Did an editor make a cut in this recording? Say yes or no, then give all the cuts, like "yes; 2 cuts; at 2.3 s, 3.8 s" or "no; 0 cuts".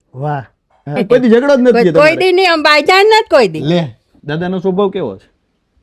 yes; 2 cuts; at 1.0 s, 4.2 s